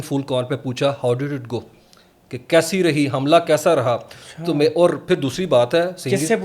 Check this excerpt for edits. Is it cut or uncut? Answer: uncut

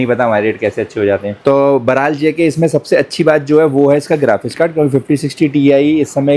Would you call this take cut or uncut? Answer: uncut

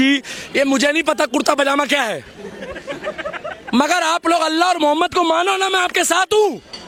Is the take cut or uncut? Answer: uncut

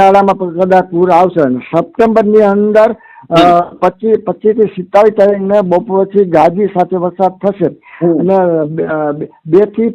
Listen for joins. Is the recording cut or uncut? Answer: uncut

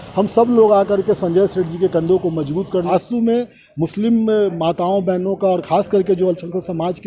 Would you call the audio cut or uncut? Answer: cut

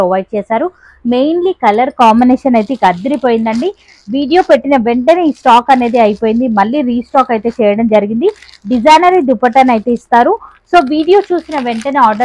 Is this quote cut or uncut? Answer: uncut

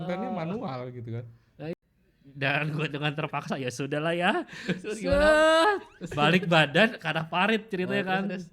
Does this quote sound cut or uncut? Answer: cut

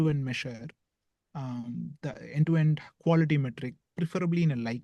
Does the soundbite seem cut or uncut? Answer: uncut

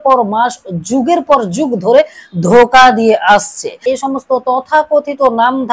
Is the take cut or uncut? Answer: cut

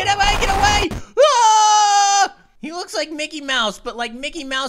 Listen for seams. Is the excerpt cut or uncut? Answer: cut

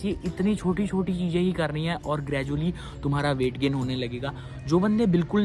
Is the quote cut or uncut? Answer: uncut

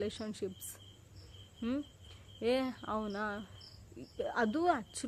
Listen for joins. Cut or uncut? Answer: uncut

